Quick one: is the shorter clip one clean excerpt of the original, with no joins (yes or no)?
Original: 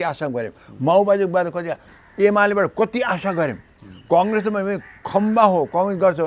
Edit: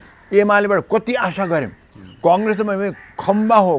yes